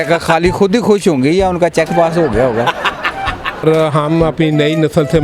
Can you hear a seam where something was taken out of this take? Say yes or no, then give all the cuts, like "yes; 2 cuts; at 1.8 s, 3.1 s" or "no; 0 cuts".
yes; 1 cut; at 3.6 s